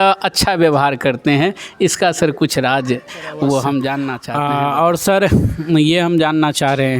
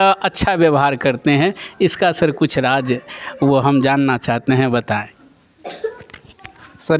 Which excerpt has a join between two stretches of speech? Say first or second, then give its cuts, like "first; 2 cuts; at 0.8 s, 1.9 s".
first; 1 cut; at 4.2 s